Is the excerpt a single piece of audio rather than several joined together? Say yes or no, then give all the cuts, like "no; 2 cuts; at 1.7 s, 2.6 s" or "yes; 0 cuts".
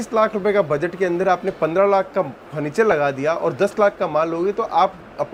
yes; 0 cuts